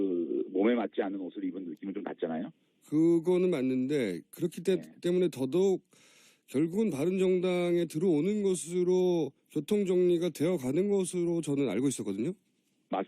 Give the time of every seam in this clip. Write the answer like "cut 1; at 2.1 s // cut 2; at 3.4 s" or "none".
cut 1; at 5.9 s